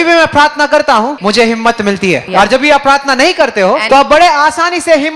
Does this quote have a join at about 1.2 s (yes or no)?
yes